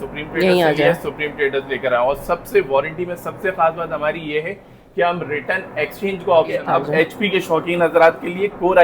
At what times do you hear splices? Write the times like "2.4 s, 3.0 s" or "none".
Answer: 6.6 s